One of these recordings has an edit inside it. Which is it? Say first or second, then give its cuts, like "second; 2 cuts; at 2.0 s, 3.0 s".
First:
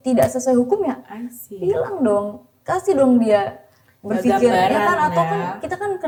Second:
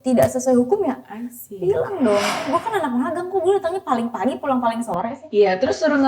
second; 1 cut; at 2.4 s